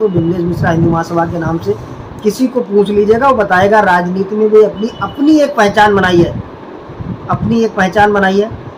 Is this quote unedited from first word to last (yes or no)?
yes